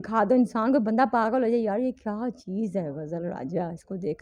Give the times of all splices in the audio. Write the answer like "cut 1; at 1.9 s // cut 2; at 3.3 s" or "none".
none